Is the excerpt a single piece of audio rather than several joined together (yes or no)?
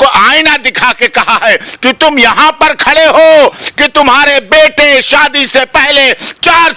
yes